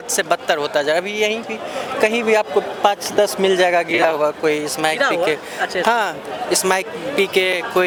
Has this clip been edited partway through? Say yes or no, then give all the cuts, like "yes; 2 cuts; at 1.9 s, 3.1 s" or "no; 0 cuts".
no; 0 cuts